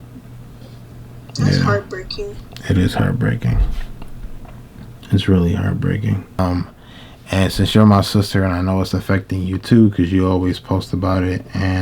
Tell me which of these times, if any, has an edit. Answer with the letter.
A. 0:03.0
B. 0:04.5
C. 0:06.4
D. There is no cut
C